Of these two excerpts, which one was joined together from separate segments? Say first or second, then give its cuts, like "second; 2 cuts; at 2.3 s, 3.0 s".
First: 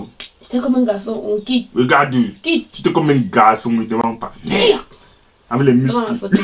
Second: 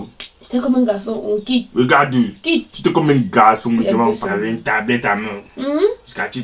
second; 1 cut; at 4.0 s